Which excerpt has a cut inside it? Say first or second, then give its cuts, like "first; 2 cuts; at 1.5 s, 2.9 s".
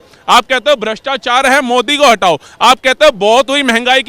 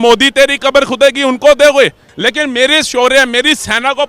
second; 1 cut; at 2.1 s